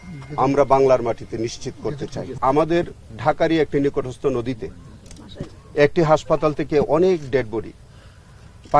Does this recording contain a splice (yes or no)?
yes